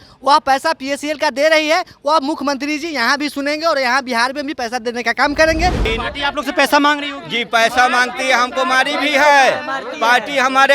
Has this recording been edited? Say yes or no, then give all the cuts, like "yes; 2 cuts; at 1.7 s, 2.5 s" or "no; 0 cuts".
yes; 1 cut; at 5.8 s